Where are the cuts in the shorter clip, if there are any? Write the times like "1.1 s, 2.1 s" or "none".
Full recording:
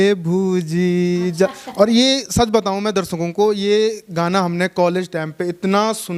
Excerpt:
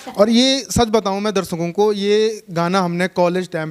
none